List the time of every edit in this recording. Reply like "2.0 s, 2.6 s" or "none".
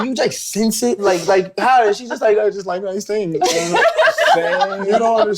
1.0 s